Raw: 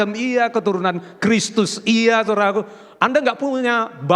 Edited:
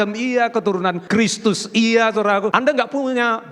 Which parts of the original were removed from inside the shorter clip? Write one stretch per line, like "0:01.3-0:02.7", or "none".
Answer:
0:01.0-0:01.1
0:02.6-0:03.0

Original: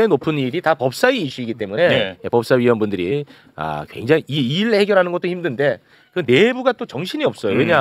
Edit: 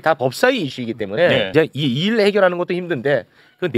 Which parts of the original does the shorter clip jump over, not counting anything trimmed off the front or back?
0:02.1-0:04.0

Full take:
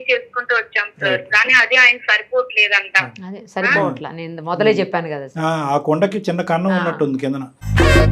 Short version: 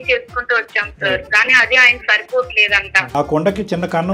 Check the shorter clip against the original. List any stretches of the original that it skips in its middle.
0:03.1-0:05.7

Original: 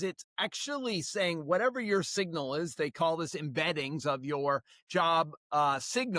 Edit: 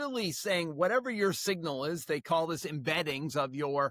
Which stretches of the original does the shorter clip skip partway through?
none

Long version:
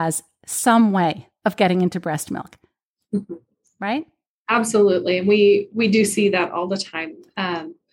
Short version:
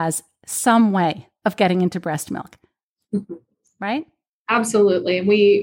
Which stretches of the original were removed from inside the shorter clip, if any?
none

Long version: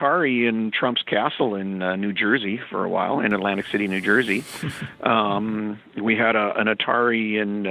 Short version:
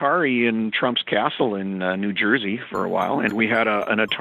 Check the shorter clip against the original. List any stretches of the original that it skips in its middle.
0:03.3-0:06.0

